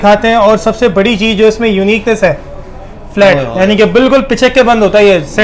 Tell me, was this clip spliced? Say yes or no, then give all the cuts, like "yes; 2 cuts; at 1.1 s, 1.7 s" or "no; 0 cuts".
no; 0 cuts